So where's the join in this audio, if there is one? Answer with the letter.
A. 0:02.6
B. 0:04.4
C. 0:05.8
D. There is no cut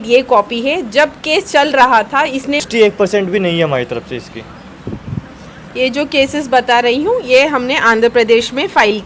A